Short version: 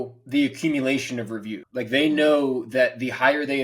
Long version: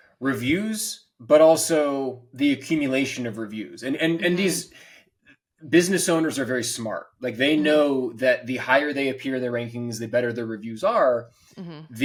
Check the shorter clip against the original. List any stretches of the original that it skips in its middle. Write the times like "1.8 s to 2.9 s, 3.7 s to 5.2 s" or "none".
3.7 s to 7.1 s